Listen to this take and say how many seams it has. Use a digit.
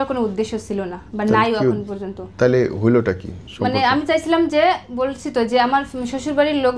0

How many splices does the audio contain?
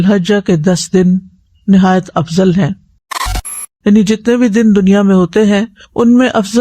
1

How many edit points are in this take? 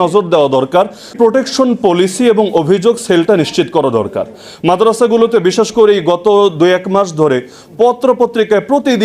1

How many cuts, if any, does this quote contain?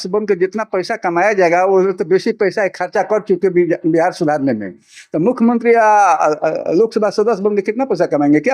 0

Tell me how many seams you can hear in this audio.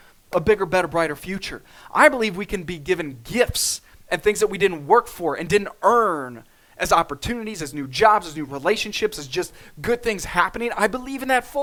0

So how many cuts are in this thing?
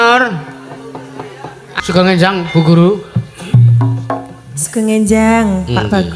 1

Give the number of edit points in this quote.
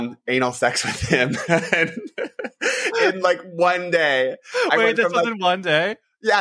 0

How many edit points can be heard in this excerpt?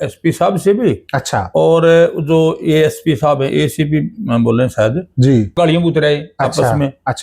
1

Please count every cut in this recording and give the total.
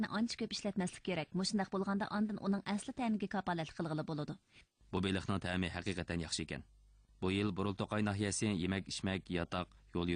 1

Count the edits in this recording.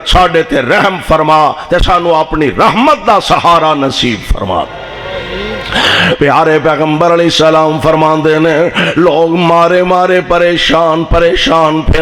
0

